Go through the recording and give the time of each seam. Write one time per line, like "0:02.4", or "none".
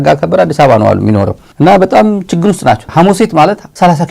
0:02.8